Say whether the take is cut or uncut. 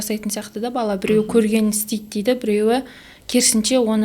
uncut